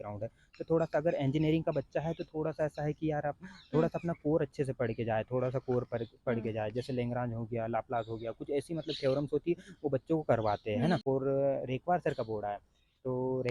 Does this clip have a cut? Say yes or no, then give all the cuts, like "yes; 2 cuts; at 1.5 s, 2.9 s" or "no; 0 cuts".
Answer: yes; 1 cut; at 11.0 s